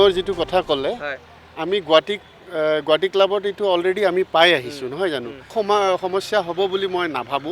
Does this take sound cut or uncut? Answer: cut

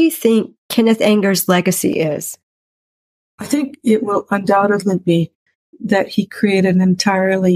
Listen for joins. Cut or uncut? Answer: uncut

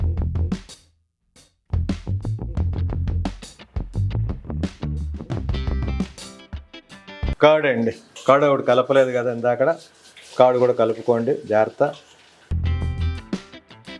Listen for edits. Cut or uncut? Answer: uncut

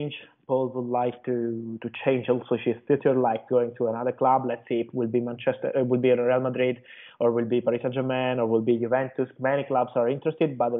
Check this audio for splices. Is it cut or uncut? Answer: uncut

